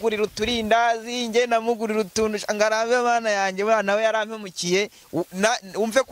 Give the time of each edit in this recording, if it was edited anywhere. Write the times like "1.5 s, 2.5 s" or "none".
none